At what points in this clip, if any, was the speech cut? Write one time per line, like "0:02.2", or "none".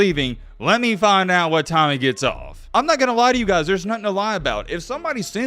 0:02.5